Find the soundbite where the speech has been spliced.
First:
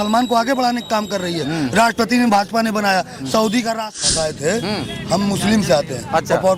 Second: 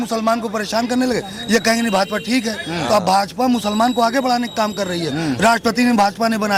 first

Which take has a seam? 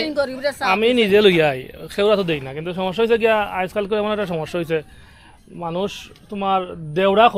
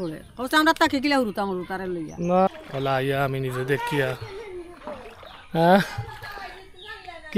second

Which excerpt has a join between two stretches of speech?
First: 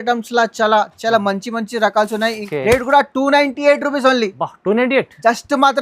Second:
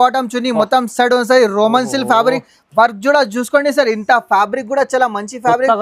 first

